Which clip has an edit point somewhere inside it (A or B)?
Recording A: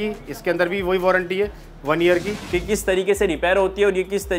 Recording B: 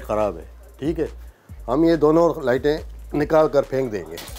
A